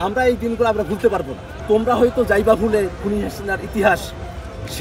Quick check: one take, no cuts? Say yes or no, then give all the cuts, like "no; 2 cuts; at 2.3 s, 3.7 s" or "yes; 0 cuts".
no; 1 cut; at 1.5 s